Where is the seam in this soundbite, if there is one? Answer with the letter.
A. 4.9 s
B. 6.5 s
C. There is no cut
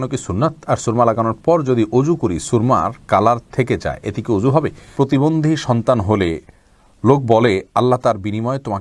A